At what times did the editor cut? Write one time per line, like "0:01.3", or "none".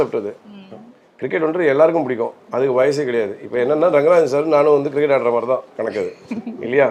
none